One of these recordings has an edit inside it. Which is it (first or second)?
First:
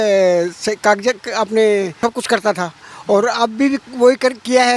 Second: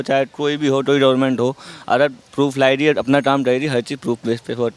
first